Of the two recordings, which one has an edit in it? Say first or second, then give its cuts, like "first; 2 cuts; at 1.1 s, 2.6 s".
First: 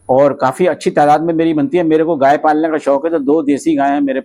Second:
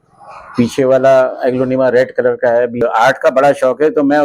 second; 1 cut; at 2.8 s